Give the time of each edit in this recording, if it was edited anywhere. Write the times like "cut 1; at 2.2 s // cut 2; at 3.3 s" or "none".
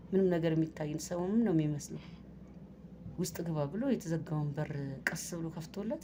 none